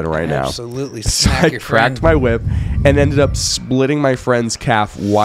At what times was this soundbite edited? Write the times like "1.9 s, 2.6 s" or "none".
none